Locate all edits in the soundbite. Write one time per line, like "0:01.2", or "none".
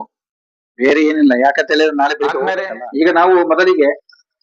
0:02.6